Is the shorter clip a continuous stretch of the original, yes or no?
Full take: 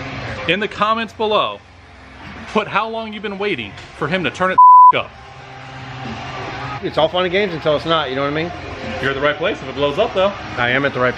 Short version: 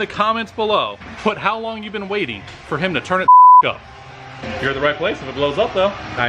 no